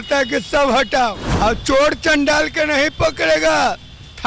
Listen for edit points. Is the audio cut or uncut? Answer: cut